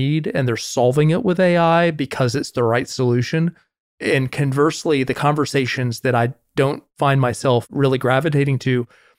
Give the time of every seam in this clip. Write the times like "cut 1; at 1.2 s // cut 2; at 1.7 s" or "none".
none